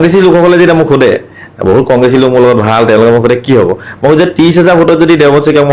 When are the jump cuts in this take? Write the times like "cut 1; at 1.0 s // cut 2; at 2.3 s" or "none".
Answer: none